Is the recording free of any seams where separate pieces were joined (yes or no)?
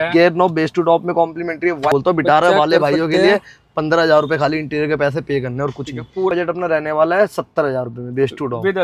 no